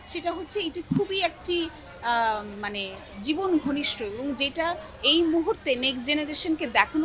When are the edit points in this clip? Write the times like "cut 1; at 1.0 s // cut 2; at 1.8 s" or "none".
none